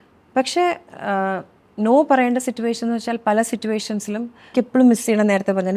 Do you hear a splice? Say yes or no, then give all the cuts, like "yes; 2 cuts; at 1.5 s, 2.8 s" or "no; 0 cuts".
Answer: yes; 1 cut; at 4.5 s